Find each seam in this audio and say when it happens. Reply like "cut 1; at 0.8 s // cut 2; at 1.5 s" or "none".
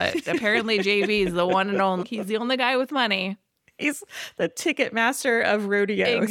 cut 1; at 2.1 s